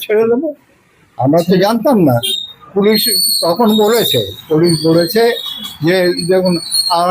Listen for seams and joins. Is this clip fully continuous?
yes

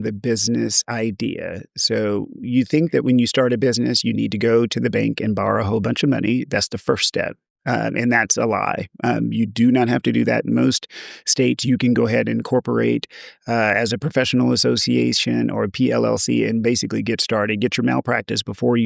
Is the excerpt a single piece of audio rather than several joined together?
yes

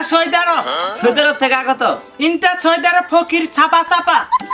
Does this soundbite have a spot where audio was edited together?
no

